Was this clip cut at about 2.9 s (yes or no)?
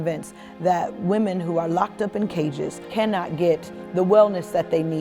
yes